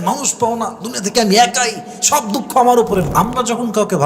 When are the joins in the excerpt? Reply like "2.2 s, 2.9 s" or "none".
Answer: 3.1 s

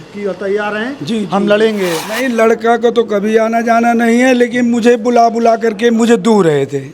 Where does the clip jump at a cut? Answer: 2.0 s

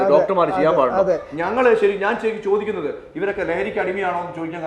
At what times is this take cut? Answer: none

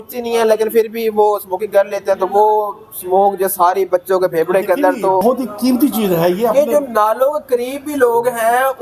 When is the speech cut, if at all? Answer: 5.2 s

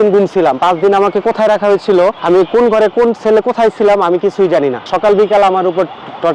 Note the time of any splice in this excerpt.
2.2 s, 4.9 s

